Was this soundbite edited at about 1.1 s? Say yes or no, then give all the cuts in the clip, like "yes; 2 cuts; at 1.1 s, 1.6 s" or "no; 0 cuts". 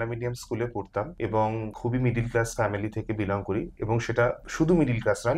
yes; 3 cuts; at 1.1 s, 1.7 s, 4.4 s